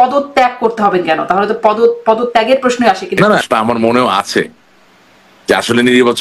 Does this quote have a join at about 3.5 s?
yes; 1 cut; at 3.5 s

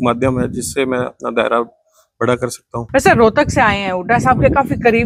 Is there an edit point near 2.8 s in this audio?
yes; 1 cut; at 2.8 s

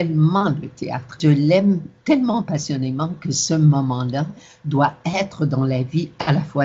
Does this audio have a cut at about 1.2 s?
yes; 1 cut; at 1.2 s

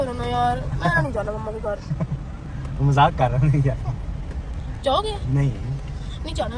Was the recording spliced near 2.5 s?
no; 0 cuts

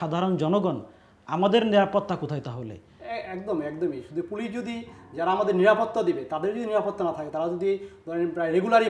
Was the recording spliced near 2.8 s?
no; 0 cuts

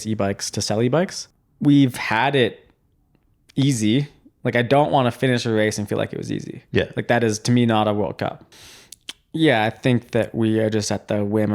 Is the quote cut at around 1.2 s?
yes; 2 cuts; at 1.2 s, 8.4 s

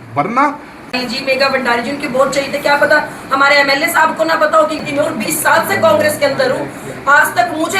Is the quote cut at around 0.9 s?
yes; 2 cuts; at 0.9 s, 4.8 s

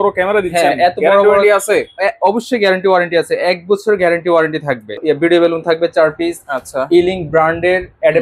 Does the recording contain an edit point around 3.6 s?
no; 1 cut; at 5.0 s

